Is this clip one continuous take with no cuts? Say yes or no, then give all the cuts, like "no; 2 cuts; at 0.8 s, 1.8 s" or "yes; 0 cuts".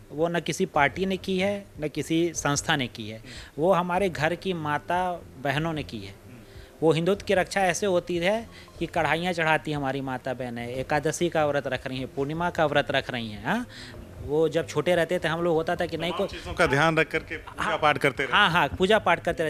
yes; 0 cuts